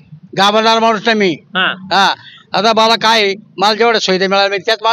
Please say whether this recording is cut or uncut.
uncut